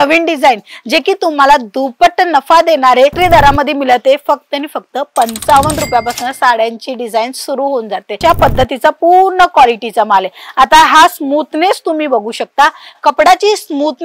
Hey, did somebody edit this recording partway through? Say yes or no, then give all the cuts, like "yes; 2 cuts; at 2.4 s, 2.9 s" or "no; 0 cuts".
yes; 2 cuts; at 3.1 s, 8.2 s